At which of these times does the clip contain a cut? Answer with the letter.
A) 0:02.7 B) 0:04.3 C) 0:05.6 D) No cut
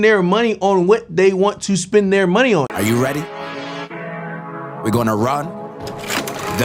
A